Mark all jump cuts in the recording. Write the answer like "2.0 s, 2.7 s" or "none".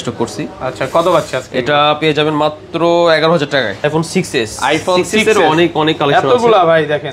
3.8 s

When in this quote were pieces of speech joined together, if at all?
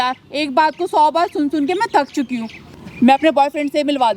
2.7 s

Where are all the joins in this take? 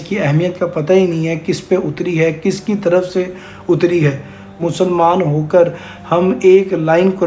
4.6 s

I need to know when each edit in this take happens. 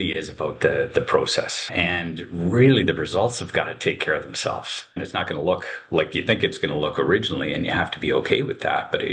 1.7 s, 5.0 s

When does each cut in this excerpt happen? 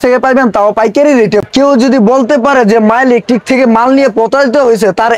1.4 s

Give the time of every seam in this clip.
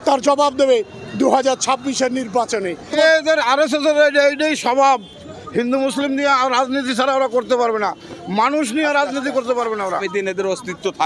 3.0 s, 10.1 s

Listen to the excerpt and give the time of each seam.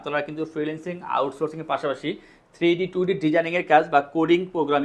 none

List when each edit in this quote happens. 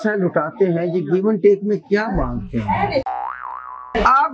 3.3 s

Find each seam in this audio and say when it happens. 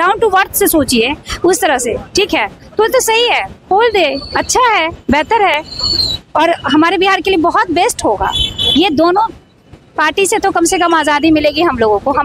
none

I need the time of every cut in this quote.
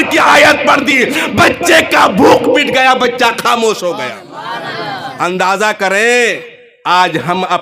none

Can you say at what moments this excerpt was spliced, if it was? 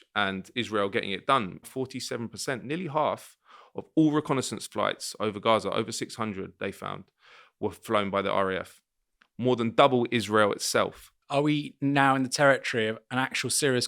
1.7 s, 11.2 s

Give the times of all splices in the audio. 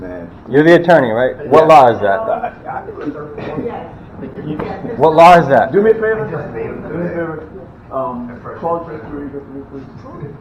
none

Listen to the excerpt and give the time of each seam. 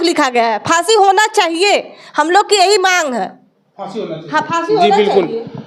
none

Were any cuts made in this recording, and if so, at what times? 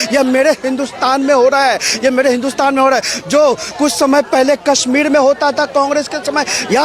none

